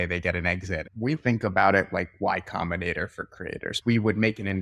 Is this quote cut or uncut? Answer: cut